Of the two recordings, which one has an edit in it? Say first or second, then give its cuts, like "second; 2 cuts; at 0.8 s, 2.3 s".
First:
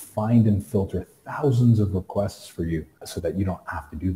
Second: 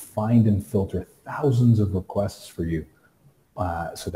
first; 1 cut; at 3.1 s